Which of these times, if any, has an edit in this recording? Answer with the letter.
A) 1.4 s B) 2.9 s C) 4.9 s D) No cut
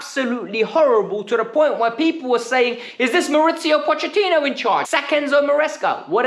C